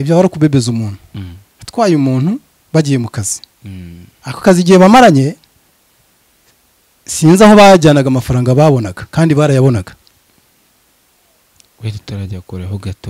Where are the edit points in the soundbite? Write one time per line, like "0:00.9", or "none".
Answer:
none